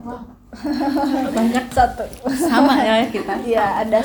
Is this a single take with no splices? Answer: yes; 0 cuts

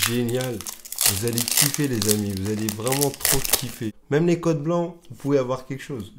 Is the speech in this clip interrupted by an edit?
yes; 1 cut; at 4.0 s

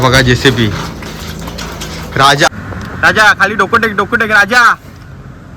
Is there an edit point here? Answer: yes; 1 cut; at 2.5 s

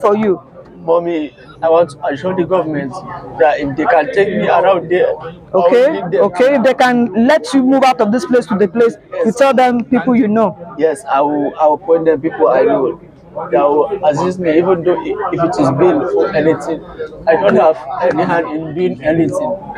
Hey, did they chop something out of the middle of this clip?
no; 0 cuts

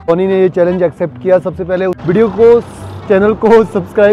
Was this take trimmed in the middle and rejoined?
yes; 1 cut; at 2.0 s

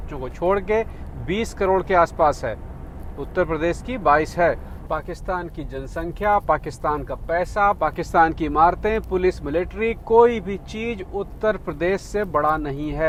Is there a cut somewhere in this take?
no; 0 cuts

